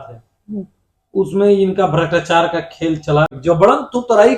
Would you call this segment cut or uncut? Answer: cut